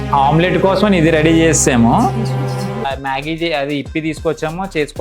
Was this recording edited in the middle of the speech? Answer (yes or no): yes